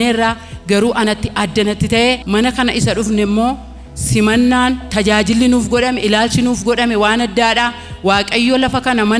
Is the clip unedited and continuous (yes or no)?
yes